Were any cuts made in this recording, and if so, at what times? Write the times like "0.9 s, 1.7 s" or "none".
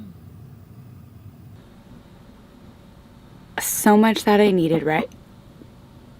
1.6 s